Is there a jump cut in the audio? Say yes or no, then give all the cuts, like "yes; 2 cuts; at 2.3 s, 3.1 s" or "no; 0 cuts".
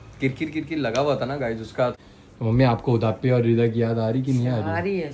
yes; 1 cut; at 2.0 s